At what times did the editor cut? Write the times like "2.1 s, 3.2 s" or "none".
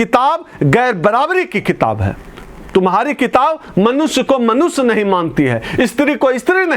none